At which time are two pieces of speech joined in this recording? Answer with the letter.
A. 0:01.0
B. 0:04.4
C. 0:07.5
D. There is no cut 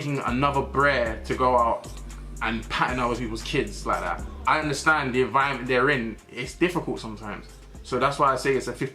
B